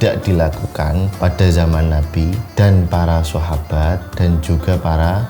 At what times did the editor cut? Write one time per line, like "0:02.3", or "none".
0:01.1
0:02.4
0:04.1